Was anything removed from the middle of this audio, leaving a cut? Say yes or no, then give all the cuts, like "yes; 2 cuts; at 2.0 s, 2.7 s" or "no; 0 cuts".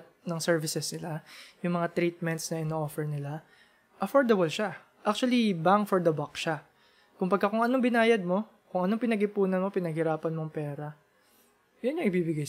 no; 0 cuts